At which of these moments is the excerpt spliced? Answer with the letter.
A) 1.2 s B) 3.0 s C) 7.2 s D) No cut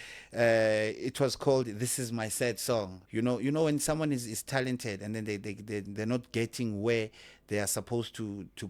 B